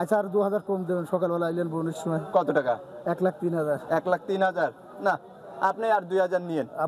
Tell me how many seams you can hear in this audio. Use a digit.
0